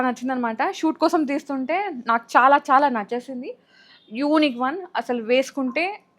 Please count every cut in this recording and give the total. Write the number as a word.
zero